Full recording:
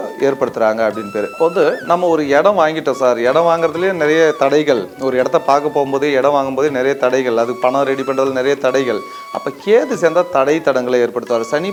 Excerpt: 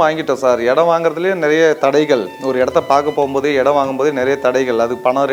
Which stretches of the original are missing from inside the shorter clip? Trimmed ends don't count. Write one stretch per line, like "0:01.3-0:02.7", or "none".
none